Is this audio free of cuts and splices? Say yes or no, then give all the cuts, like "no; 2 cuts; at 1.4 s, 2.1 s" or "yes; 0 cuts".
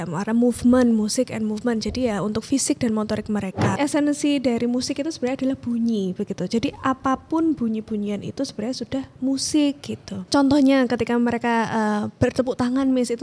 no; 1 cut; at 3.7 s